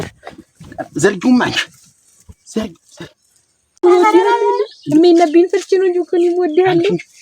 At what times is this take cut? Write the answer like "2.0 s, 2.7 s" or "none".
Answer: 3.8 s